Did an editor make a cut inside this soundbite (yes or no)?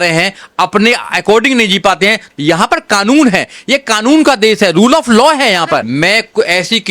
yes